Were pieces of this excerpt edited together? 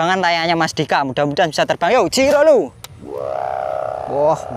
no; 0 cuts

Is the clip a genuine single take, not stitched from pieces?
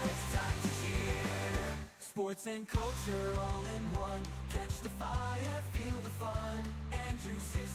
yes; 0 cuts

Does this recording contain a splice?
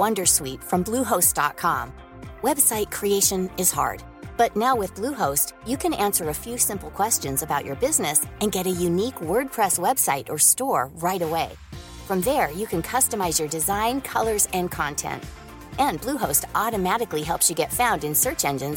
no; 0 cuts

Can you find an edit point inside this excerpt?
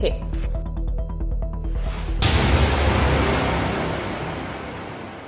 yes; 1 cut; at 2.1 s

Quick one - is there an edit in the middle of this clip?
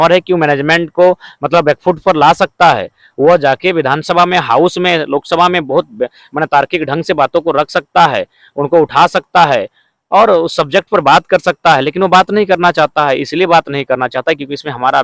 no; 0 cuts

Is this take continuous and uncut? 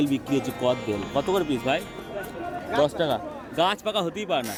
yes; 0 cuts

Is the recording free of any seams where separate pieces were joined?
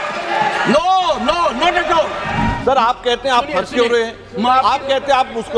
no; 1 cut; at 2.5 s

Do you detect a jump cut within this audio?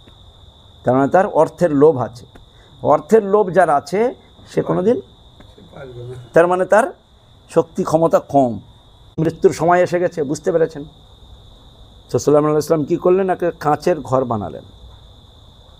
yes; 1 cut; at 9.2 s

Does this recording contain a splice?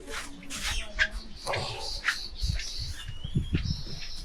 no; 0 cuts

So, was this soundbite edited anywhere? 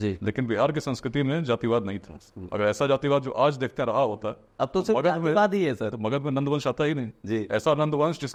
no; 0 cuts

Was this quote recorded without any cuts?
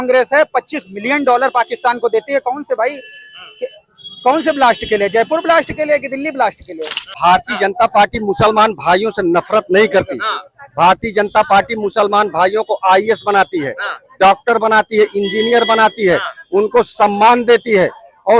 no; 1 cut; at 7.1 s

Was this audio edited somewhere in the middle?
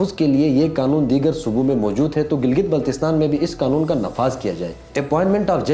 yes; 1 cut; at 4.8 s

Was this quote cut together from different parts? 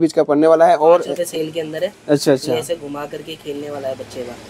yes; 1 cut; at 1.2 s

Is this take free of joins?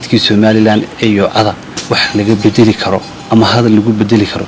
yes; 0 cuts

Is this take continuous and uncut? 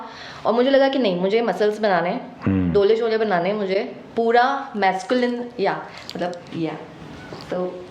yes; 0 cuts

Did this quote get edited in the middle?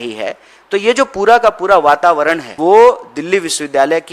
yes; 1 cut; at 2.5 s

